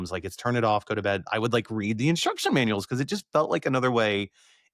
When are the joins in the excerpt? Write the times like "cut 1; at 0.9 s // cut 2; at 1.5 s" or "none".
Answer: none